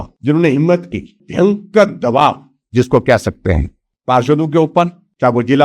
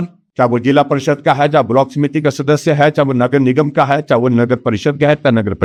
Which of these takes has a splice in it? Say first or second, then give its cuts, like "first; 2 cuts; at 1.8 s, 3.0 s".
first; 1 cut; at 1.2 s